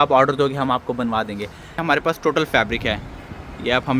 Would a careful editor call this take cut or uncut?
cut